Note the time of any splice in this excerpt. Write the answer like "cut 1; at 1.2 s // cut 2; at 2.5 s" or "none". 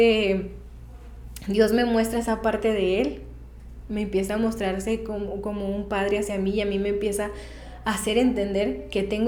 none